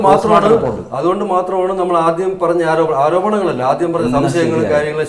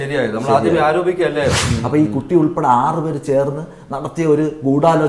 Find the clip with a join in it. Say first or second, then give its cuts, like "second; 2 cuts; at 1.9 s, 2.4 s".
second; 1 cut; at 1.7 s